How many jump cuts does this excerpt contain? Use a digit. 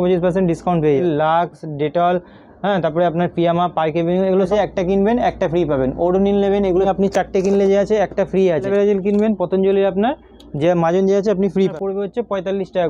5